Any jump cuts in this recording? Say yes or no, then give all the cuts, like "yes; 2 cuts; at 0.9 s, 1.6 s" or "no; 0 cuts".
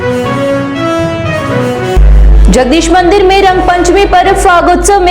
yes; 1 cut; at 1.9 s